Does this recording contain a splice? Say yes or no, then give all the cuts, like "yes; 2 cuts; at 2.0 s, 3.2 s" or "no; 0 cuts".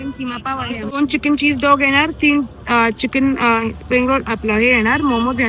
yes; 1 cut; at 1.0 s